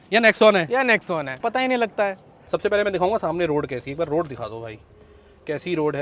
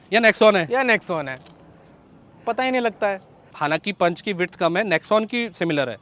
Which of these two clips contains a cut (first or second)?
first